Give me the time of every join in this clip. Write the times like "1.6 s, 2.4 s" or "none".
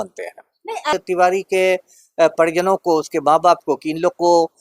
0.9 s